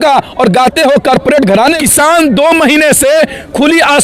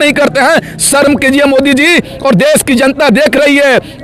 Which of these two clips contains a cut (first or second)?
first